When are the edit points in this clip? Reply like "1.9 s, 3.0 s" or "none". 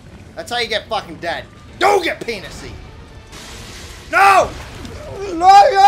1.6 s